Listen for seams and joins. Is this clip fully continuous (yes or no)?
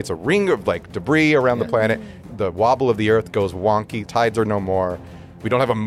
no